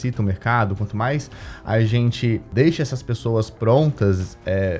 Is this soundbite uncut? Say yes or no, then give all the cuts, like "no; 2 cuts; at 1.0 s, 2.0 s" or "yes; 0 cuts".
no; 1 cut; at 2.5 s